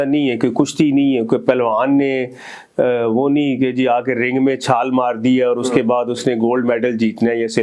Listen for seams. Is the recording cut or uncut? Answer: uncut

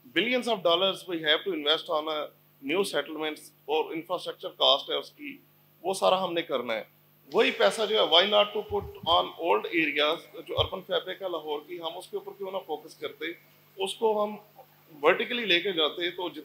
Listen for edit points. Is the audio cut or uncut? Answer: uncut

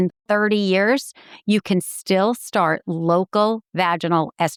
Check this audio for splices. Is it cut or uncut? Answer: uncut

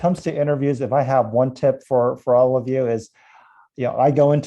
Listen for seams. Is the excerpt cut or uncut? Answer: uncut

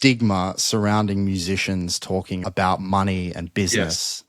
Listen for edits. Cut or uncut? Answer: cut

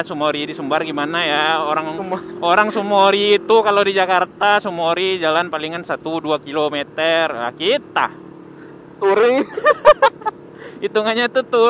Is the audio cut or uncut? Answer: uncut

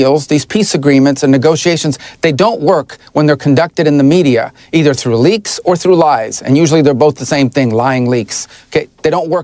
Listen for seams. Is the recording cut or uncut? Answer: uncut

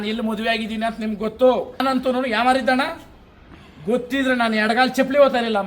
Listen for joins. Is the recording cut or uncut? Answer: cut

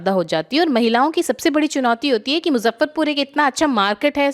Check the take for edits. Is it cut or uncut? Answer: uncut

